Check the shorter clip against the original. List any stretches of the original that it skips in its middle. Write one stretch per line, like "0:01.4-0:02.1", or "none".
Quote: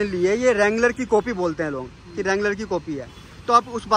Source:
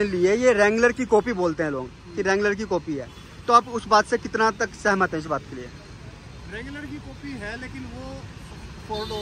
none